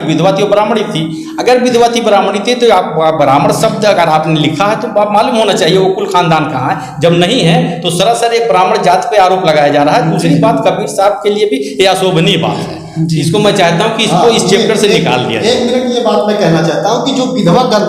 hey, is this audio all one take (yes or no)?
yes